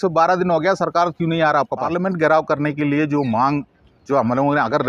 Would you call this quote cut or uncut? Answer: cut